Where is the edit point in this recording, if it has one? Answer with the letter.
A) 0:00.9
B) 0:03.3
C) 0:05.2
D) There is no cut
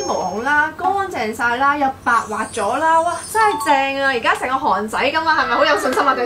D